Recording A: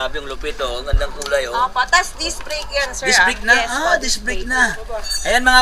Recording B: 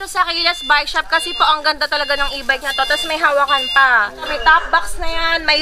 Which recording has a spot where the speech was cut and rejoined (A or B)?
B